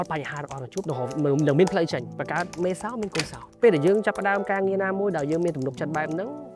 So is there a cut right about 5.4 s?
no; 2 cuts; at 2.1 s, 3.4 s

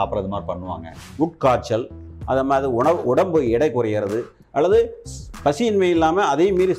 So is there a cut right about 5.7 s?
no; 1 cut; at 1.0 s

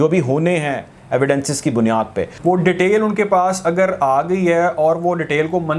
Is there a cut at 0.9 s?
no; 1 cut; at 2.3 s

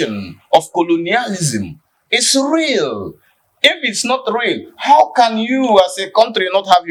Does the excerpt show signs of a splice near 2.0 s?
no; 0 cuts

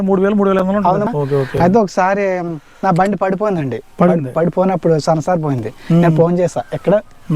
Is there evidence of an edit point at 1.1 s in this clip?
yes; 1 cut; at 1.1 s

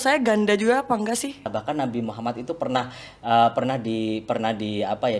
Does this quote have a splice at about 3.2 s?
no; 1 cut; at 1.5 s

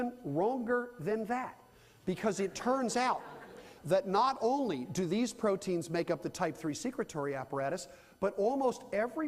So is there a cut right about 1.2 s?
yes; 1 cut; at 1.2 s

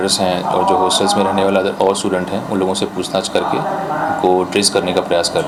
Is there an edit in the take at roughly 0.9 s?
no; 0 cuts

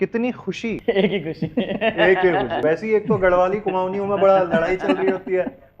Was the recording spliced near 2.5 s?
yes; 2 cuts; at 0.8 s, 2.5 s

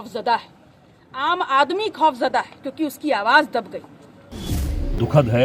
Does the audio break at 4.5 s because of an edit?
yes; 1 cut; at 4.5 s

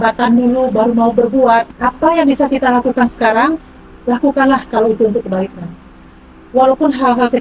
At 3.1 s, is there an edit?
no; 1 cut; at 1.7 s

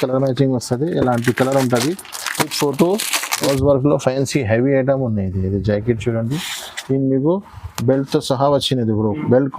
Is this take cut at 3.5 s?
yes; 1 cut; at 3.5 s

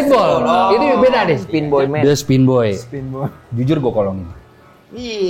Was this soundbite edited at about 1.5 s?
yes; 1 cut; at 1.5 s

